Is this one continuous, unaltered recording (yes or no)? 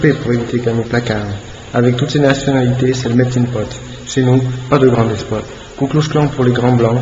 yes